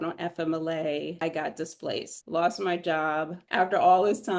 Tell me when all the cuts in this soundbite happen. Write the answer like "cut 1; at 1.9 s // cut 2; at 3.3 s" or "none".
cut 1; at 1.2 s // cut 2; at 2.2 s // cut 3; at 3.3 s